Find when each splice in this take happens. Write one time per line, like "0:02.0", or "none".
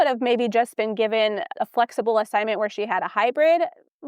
0:01.5